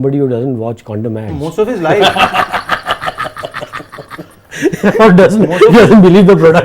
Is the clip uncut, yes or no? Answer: yes